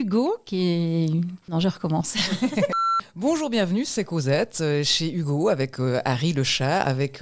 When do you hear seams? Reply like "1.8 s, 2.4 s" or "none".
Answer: 1.4 s, 3.0 s